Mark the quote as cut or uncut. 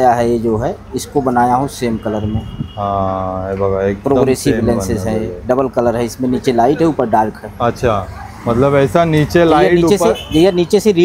uncut